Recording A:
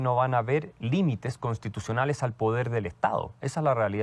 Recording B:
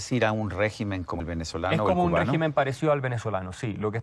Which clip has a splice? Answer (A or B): B